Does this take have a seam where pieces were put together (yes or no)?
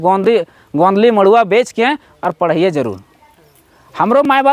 no